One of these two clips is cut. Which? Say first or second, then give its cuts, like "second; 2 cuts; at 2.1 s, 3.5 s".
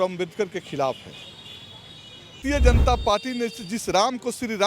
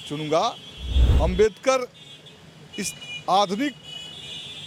first; 1 cut; at 2.4 s